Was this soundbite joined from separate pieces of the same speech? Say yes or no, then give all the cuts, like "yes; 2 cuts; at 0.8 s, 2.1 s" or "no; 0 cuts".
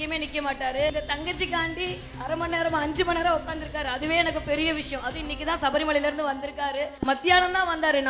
yes; 3 cuts; at 0.9 s, 2.1 s, 6.9 s